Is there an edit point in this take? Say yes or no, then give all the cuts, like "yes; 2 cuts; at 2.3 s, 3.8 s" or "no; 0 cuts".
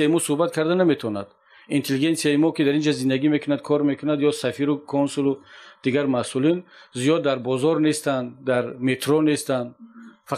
no; 0 cuts